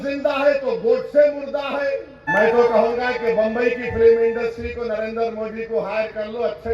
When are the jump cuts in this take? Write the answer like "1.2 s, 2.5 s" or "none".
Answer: 2.2 s

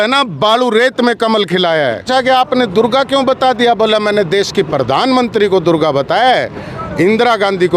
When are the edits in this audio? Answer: 2.1 s

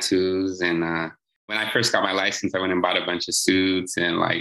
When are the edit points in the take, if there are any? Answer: 1.6 s

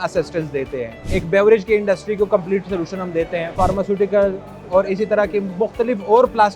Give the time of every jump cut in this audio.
1.0 s, 3.5 s

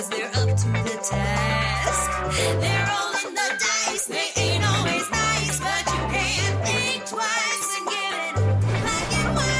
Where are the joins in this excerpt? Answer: none

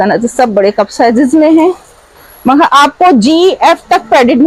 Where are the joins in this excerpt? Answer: none

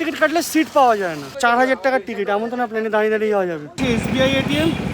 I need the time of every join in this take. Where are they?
1.3 s, 3.7 s

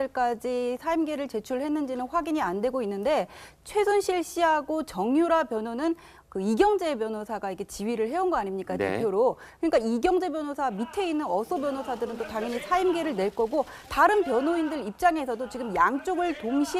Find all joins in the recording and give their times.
11.2 s

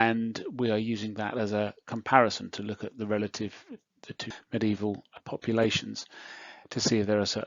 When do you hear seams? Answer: 4.3 s, 5.2 s

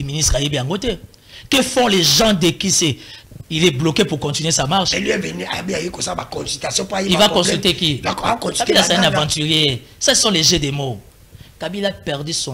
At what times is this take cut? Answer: 3.1 s

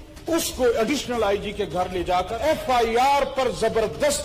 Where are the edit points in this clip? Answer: 2.4 s

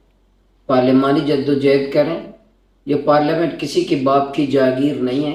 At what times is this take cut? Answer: none

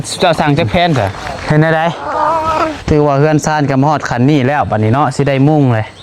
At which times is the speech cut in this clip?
1.3 s

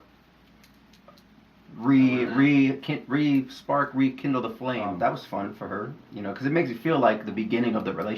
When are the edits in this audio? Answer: 4.9 s

